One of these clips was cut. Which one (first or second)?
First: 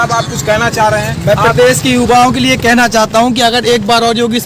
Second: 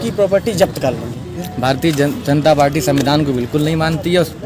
second